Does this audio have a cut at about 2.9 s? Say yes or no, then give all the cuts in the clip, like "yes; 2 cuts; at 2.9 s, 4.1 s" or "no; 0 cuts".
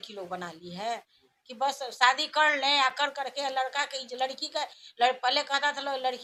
no; 0 cuts